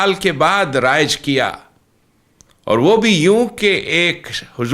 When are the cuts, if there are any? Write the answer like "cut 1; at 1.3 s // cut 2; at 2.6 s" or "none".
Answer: none